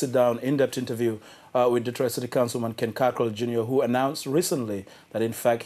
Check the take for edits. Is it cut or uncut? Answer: uncut